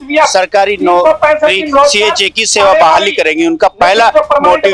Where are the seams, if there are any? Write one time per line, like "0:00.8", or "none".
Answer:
none